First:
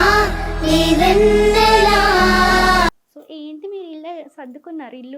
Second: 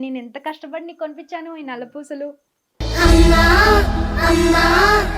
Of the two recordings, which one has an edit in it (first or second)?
first